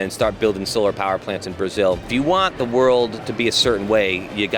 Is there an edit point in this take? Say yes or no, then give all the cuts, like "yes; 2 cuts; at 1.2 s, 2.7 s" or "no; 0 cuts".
yes; 1 cut; at 2.1 s